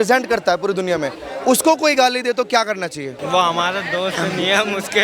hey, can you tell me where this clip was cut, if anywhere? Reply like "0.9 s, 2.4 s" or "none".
3.2 s